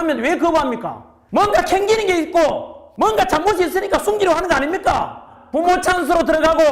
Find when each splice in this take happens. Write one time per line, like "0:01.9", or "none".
0:05.4